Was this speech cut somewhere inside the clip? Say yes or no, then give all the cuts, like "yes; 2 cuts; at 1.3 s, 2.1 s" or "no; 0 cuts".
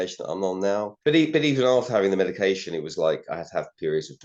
yes; 1 cut; at 0.9 s